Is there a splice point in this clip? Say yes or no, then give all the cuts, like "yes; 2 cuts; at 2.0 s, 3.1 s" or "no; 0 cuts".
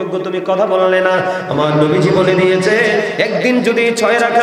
no; 0 cuts